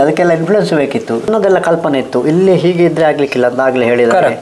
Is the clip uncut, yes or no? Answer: no